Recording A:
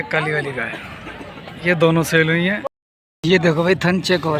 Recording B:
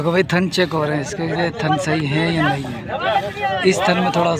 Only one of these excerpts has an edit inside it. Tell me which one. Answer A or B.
A